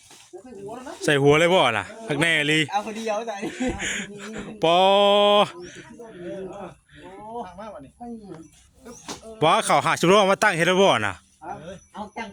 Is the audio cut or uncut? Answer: uncut